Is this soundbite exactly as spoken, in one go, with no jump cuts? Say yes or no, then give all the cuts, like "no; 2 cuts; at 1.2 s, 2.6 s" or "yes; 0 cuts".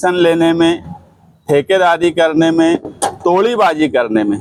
yes; 0 cuts